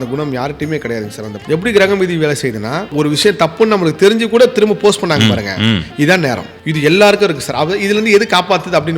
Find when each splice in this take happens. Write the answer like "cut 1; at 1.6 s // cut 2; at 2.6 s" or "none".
cut 1; at 1.3 s // cut 2; at 2.9 s // cut 3; at 6.5 s